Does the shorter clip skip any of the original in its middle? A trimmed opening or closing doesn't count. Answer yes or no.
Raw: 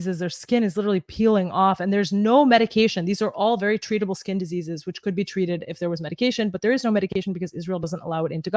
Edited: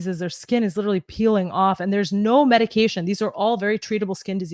no